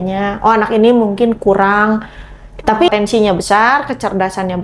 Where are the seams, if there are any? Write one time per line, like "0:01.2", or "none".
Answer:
0:02.9